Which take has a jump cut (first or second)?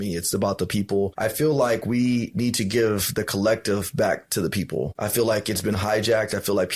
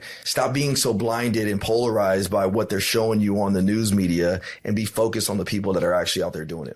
first